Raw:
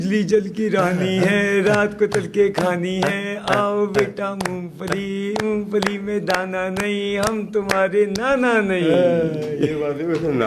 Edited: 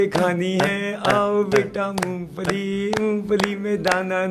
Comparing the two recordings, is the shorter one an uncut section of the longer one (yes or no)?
yes